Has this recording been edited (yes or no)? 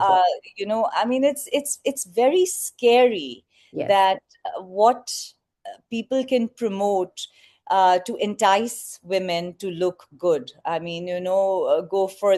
no